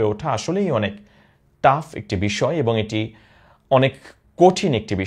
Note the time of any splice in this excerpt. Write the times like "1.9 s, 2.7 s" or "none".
none